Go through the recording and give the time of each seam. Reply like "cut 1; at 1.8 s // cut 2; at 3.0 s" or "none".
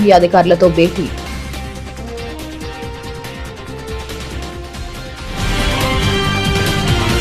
cut 1; at 1.2 s // cut 2; at 2.9 s